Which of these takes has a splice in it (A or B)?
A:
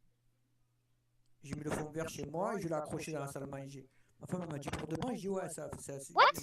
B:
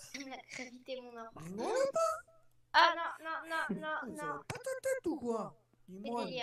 A